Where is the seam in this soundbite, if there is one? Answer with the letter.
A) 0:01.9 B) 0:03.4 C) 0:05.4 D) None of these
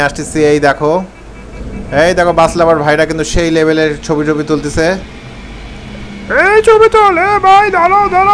D